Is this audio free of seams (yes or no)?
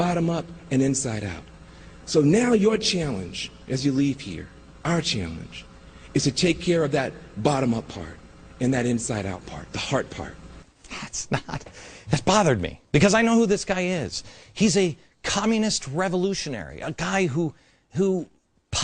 no